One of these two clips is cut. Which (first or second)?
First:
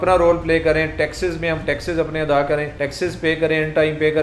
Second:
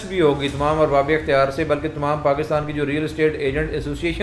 first